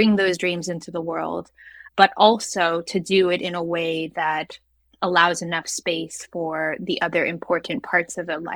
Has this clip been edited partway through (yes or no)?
yes